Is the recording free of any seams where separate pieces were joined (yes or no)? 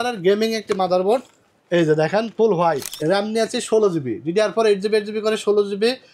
no